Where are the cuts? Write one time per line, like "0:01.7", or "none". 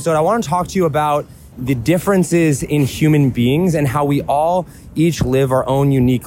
0:01.5